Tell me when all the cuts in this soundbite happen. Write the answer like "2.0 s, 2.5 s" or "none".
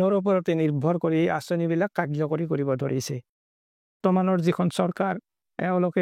4.0 s